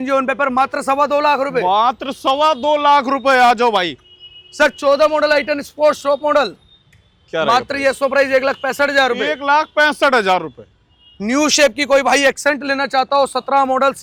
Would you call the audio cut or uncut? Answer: uncut